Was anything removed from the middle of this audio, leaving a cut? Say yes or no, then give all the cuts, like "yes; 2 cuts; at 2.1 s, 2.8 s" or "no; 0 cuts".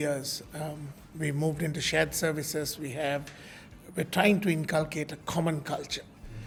no; 0 cuts